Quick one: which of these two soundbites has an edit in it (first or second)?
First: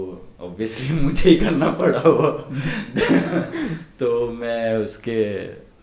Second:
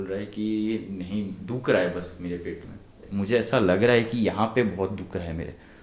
second